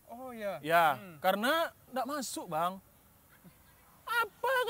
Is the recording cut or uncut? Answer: uncut